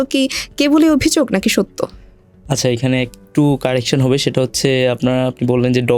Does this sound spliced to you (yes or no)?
no